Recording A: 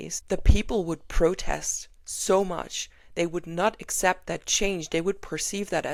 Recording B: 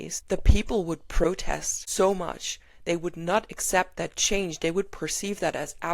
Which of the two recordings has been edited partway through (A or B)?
B